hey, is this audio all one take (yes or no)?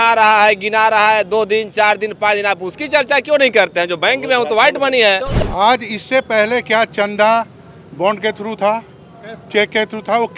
no